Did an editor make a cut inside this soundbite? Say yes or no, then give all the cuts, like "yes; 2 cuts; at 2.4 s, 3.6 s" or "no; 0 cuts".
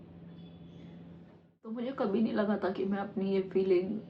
yes; 1 cut; at 1.8 s